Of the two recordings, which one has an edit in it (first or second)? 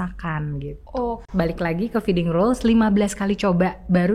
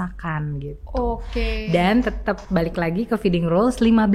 first